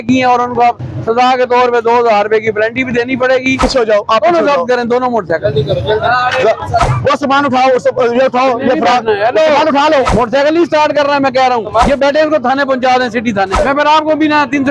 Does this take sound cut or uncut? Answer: cut